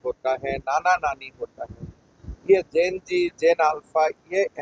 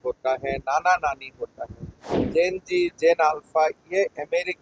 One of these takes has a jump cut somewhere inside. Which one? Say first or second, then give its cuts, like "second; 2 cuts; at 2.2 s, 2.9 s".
second; 1 cut; at 2.3 s